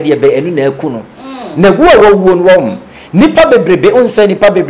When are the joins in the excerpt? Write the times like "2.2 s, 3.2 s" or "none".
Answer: none